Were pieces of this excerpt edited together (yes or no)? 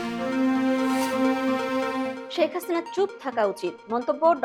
no